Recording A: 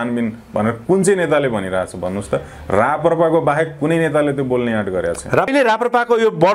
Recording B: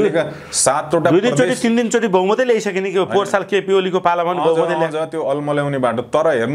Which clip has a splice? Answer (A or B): A